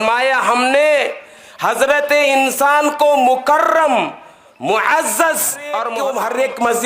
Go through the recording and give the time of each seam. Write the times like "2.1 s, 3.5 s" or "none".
5.9 s